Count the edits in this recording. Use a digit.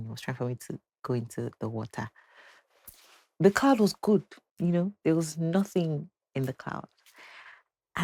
0